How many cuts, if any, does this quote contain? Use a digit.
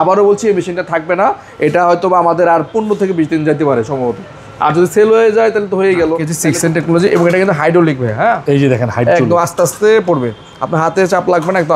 1